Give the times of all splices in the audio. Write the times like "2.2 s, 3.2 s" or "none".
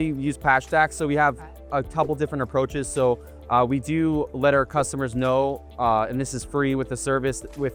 none